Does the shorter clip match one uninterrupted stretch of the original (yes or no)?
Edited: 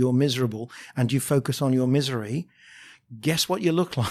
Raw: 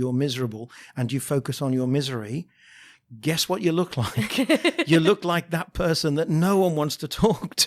yes